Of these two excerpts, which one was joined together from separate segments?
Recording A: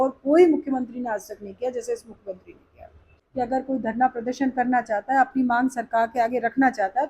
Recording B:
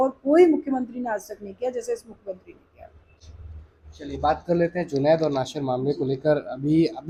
A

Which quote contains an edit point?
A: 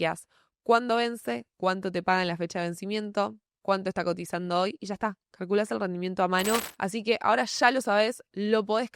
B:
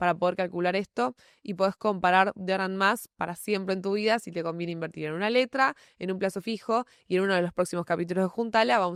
A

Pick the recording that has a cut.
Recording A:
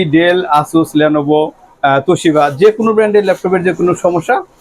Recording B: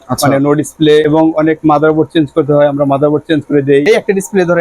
B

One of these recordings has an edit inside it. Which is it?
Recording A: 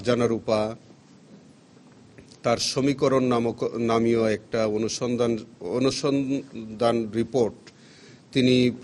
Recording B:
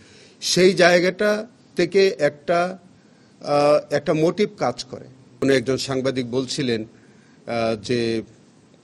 B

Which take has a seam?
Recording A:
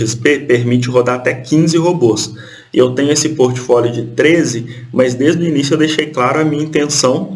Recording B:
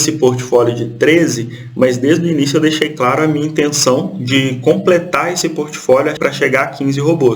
B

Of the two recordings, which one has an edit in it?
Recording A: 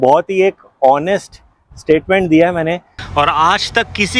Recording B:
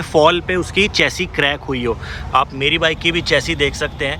A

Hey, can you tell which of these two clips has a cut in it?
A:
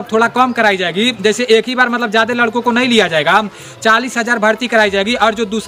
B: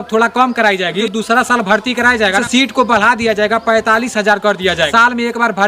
B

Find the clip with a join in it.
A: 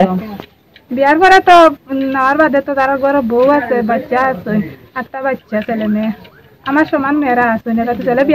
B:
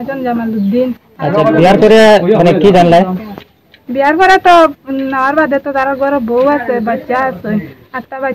B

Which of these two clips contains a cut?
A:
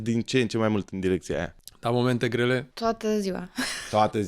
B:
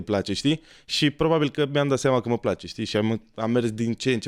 A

